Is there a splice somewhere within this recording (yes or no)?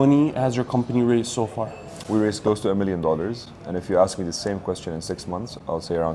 no